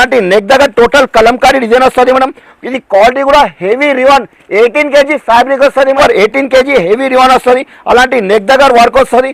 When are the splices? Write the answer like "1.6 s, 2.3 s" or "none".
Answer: 6.0 s